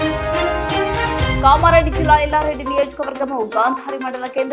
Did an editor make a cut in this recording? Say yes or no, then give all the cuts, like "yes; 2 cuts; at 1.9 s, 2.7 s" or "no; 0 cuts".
no; 0 cuts